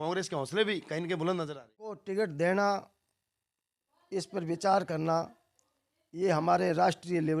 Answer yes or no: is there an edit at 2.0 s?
yes